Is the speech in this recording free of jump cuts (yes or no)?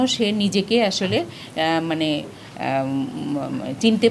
yes